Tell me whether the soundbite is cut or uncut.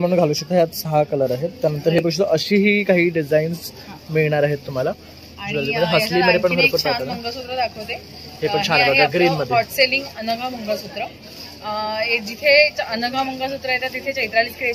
uncut